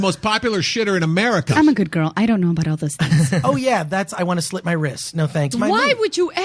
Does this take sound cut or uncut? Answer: cut